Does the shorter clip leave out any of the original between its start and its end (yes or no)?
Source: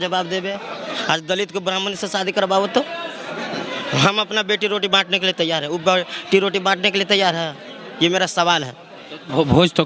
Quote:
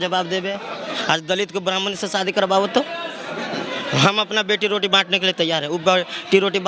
no